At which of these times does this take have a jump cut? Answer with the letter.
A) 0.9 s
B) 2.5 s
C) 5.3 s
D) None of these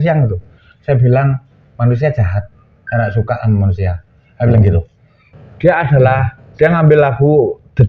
C